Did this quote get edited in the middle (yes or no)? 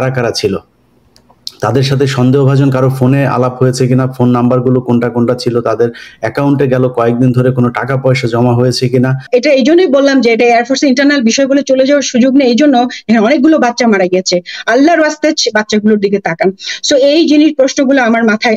yes